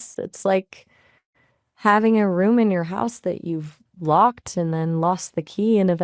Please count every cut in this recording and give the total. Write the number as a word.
zero